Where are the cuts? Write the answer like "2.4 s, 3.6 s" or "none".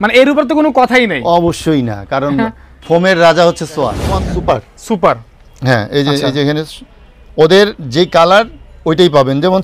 4.1 s